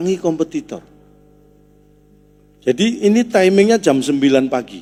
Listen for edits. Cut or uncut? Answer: uncut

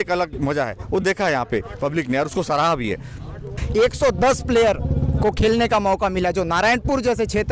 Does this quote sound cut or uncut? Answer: cut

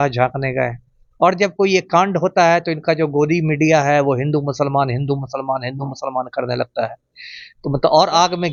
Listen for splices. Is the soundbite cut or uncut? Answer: uncut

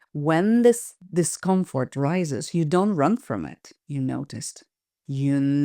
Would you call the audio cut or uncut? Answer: cut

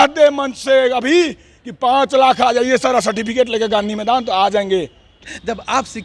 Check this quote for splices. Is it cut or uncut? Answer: cut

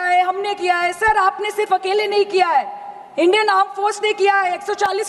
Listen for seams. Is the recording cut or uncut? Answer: uncut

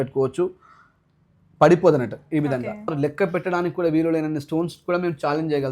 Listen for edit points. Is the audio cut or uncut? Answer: cut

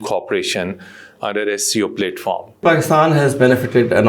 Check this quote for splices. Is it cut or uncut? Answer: cut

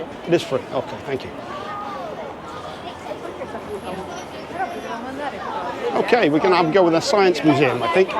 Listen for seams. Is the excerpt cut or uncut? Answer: uncut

